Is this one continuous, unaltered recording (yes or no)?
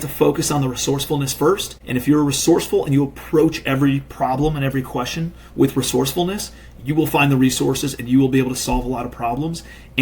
no